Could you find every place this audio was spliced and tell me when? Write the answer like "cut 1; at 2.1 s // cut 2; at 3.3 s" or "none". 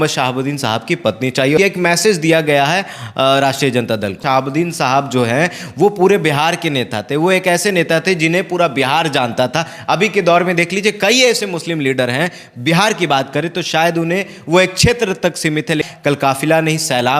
cut 1; at 1.6 s // cut 2; at 4.2 s // cut 3; at 15.9 s

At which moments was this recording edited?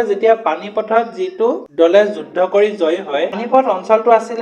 cut 1; at 3.4 s

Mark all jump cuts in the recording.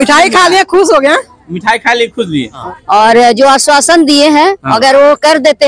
cut 1; at 2.7 s

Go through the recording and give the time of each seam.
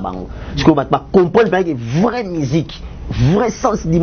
none

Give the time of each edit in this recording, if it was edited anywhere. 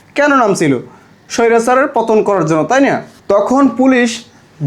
cut 1; at 3.1 s

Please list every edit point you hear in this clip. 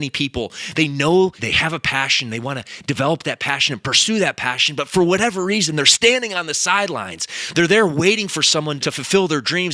cut 1; at 1.4 s // cut 2; at 8.7 s

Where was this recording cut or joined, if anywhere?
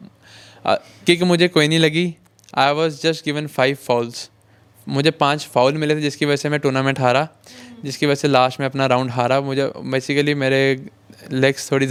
none

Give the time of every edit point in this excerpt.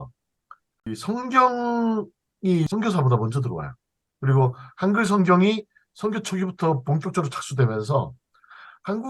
cut 1; at 0.9 s // cut 2; at 2.7 s

